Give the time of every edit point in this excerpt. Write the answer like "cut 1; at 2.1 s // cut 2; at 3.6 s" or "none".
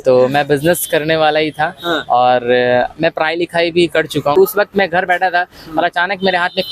cut 1; at 4.4 s